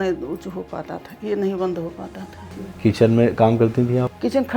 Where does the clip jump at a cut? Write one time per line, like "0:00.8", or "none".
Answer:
0:02.6